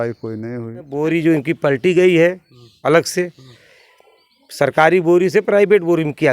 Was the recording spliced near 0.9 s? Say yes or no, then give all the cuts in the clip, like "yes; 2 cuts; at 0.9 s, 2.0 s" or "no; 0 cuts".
yes; 1 cut; at 0.9 s